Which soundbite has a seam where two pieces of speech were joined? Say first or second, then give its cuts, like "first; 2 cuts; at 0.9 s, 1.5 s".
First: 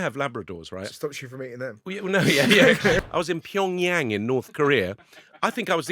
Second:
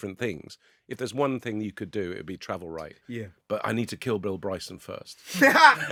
first; 2 cuts; at 0.9 s, 3.1 s